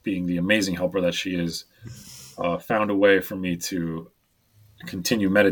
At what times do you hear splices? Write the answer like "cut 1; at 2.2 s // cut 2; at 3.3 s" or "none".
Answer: cut 1; at 4.4 s